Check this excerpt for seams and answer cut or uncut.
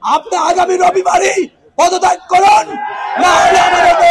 uncut